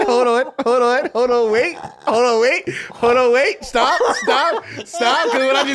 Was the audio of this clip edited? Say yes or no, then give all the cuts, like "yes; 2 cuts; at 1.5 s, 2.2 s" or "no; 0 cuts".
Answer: no; 0 cuts